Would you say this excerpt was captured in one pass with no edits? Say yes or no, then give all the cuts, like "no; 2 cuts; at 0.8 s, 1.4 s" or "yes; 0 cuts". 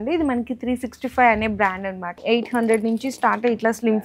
no; 1 cut; at 2.1 s